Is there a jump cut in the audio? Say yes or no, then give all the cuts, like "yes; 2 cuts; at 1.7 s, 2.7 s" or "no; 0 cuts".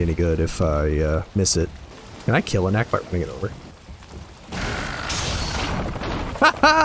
yes; 1 cut; at 1.9 s